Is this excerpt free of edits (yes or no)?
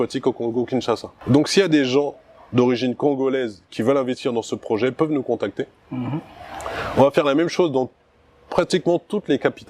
yes